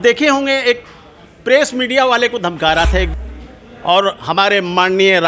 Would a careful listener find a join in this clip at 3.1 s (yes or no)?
yes